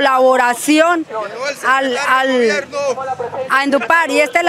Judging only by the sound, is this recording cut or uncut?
uncut